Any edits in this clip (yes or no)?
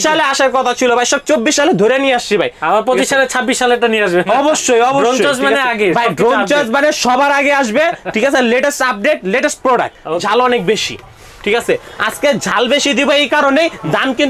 yes